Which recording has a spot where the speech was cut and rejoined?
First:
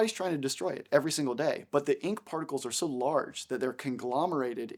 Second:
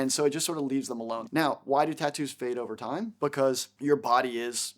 second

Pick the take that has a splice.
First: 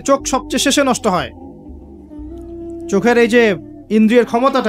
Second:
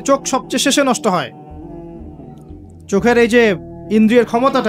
first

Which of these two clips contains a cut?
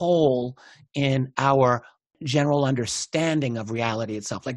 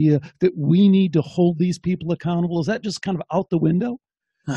first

